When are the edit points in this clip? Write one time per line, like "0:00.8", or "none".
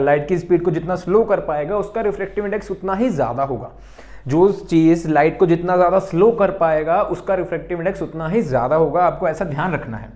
none

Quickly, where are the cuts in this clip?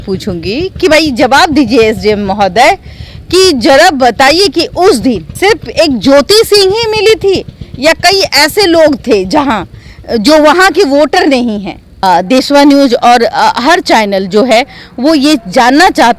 0:05.3
0:11.9

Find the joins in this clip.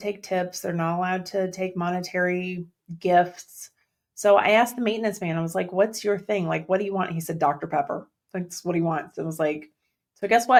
none

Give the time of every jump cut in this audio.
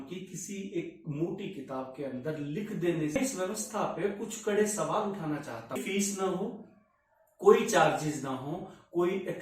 0:03.2
0:05.8

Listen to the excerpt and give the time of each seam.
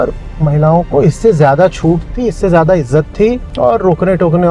0:03.5

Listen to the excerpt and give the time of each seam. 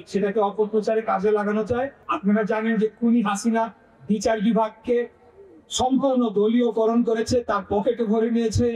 none

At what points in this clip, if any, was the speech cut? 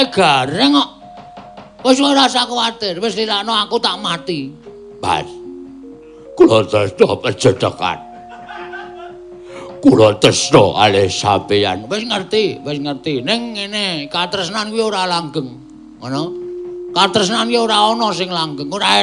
none

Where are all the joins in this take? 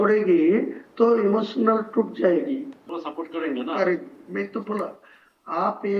0:02.8

